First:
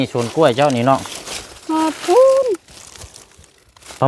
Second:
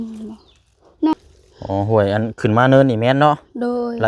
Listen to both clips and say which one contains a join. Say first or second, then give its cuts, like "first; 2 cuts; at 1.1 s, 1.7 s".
second; 1 cut; at 1.1 s